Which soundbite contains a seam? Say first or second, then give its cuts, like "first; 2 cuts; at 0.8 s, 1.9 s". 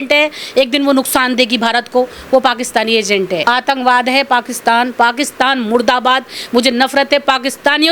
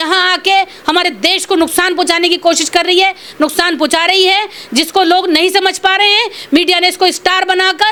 first; 1 cut; at 3.4 s